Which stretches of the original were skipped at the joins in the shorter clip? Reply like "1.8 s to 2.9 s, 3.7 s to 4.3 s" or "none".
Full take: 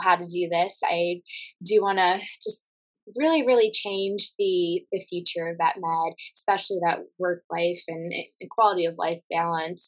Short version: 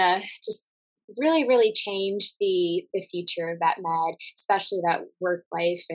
none